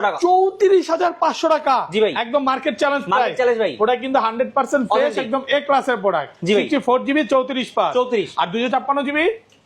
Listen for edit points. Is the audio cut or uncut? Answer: uncut